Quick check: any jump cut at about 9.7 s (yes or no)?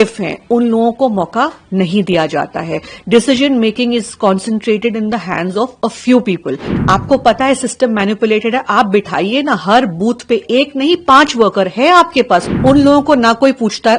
no